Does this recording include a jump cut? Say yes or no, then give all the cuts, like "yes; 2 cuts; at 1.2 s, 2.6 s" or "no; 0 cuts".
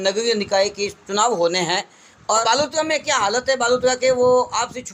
yes; 1 cut; at 2.4 s